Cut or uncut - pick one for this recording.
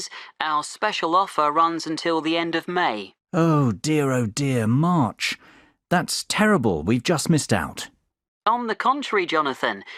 uncut